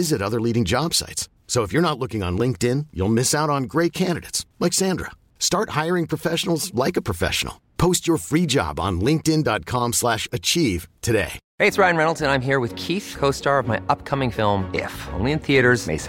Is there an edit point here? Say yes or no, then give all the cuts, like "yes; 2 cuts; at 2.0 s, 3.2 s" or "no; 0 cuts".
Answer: yes; 1 cut; at 11.4 s